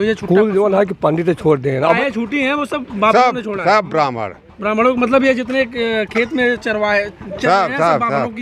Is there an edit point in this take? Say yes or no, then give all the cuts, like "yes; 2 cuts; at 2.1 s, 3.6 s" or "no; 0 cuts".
yes; 1 cut; at 2.0 s